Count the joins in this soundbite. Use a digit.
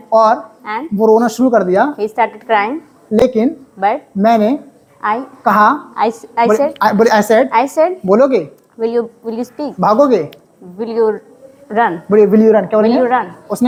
0